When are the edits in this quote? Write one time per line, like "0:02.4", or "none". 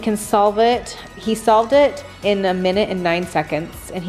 0:01.2